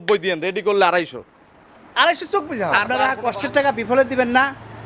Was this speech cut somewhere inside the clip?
yes; 1 cut; at 2.9 s

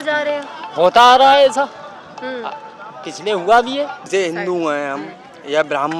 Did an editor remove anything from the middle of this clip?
yes; 1 cut; at 4.1 s

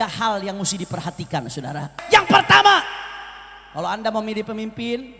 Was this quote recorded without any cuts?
no; 1 cut; at 2.0 s

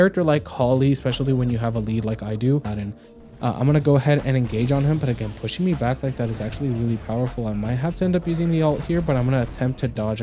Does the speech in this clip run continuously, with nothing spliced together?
no; 1 cut; at 2.7 s

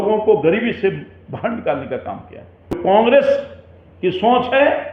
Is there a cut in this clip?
yes; 1 cut; at 2.8 s

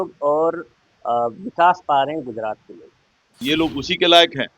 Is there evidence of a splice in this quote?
yes; 1 cut; at 3.4 s

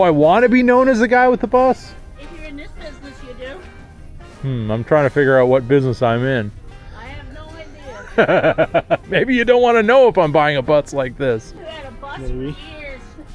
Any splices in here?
yes; 1 cut; at 11.6 s

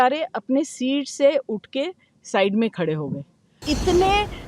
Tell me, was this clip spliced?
yes; 1 cut; at 3.5 s

